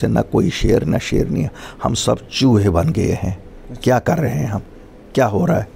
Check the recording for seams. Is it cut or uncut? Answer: uncut